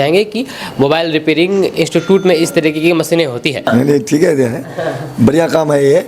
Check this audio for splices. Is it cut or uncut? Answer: cut